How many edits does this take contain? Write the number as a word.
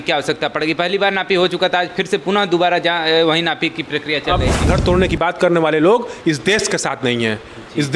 one